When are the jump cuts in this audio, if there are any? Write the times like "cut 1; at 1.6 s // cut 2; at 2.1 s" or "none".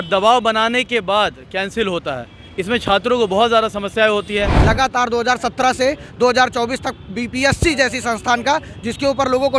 cut 1; at 4.5 s